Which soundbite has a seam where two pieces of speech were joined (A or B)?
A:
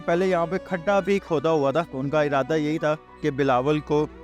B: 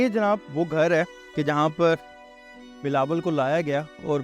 A